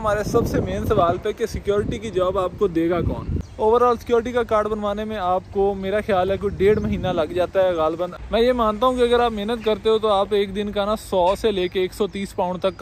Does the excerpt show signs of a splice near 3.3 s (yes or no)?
yes